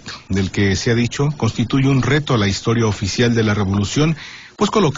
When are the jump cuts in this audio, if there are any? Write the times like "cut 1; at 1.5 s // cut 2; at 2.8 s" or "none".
none